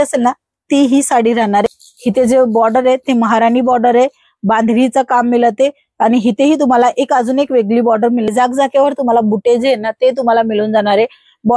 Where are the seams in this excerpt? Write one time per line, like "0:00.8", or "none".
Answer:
0:01.6
0:08.3